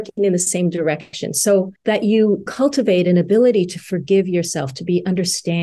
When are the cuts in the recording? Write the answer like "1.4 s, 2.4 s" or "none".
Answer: 1.7 s, 2.5 s